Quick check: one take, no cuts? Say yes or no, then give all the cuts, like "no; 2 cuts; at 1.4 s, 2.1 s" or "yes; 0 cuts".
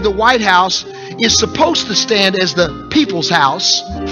no; 1 cut; at 2.8 s